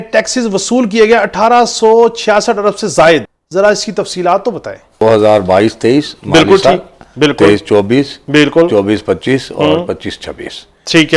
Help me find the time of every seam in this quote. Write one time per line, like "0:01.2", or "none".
0:03.4
0:05.0